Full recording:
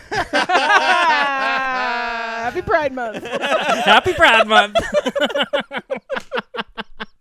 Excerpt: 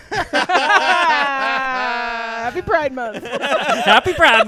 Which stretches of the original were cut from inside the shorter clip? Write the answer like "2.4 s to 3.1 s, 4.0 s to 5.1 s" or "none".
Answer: none